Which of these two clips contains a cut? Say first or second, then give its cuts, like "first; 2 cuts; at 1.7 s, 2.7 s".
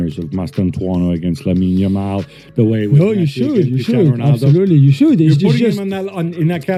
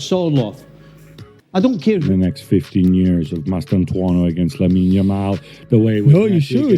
second; 1 cut; at 2.0 s